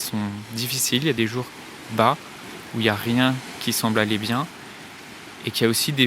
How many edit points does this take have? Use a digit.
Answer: 1